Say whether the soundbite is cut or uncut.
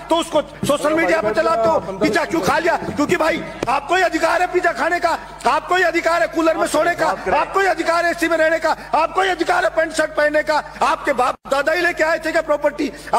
uncut